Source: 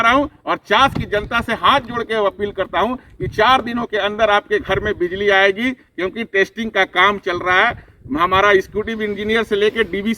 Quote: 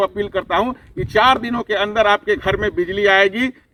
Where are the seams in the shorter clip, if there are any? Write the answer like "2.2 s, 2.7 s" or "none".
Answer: none